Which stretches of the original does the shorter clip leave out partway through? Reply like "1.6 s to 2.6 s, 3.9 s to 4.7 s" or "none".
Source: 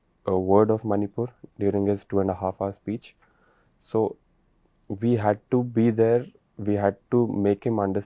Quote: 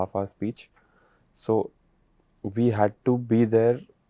none